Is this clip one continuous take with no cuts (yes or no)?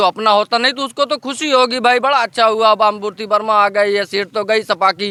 yes